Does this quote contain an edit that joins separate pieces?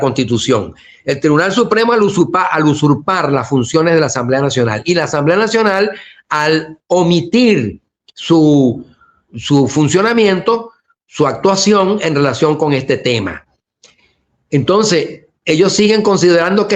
no; 0 cuts

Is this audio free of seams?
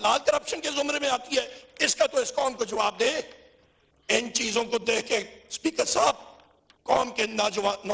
yes; 0 cuts

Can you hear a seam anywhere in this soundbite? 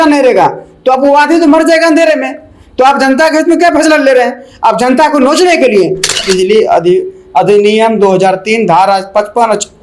yes; 1 cut; at 6.2 s

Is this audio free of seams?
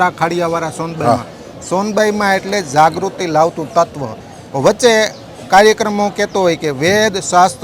yes; 0 cuts

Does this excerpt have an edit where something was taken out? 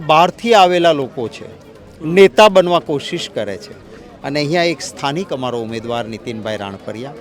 no; 0 cuts

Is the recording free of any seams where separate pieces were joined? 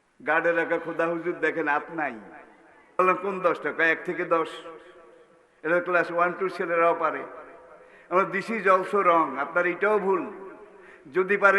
no; 1 cut; at 3.0 s

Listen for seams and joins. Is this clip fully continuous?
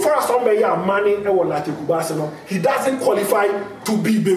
yes; 0 cuts

